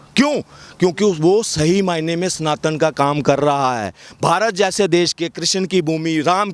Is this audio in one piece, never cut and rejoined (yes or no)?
yes